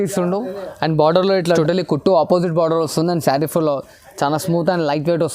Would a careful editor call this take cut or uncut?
cut